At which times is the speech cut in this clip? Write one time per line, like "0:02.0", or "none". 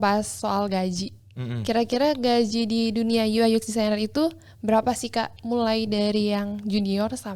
none